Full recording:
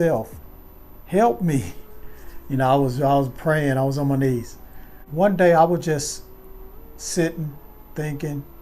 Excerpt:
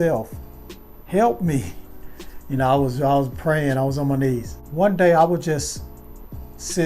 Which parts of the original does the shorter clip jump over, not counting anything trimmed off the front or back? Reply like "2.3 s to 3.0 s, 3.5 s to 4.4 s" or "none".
4.6 s to 5.0 s